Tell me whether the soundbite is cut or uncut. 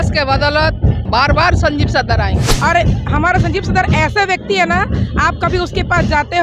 cut